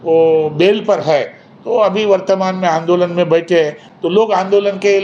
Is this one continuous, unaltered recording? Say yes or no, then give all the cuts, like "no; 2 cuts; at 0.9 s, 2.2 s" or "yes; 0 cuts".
yes; 0 cuts